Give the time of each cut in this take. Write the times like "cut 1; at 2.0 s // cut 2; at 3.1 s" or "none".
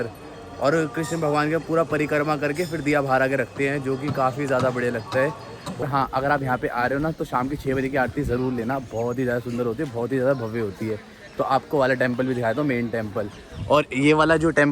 cut 1; at 5.8 s